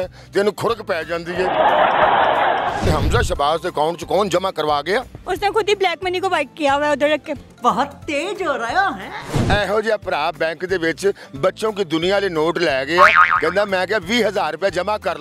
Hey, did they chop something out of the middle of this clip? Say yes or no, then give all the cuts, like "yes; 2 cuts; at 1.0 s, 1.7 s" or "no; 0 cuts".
yes; 3 cuts; at 2.8 s, 5.2 s, 9.5 s